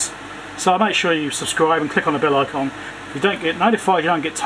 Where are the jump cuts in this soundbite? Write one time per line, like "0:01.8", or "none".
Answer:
0:02.9